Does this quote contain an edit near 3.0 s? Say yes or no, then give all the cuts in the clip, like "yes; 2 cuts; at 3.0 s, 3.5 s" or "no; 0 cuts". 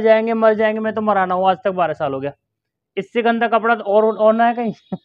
no; 0 cuts